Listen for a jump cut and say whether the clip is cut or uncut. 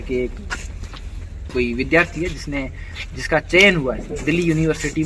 uncut